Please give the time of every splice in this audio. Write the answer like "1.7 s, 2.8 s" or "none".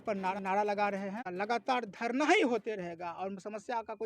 1.3 s